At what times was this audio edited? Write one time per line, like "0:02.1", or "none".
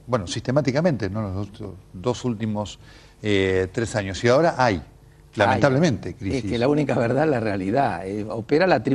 none